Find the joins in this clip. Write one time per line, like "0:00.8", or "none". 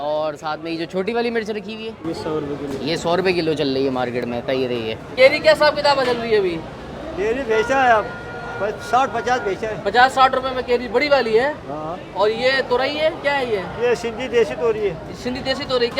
none